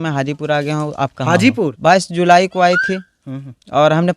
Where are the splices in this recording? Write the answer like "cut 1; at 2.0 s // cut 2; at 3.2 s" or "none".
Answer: cut 1; at 1.7 s